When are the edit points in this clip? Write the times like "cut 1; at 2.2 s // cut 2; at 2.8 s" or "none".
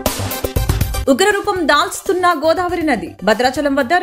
cut 1; at 1.0 s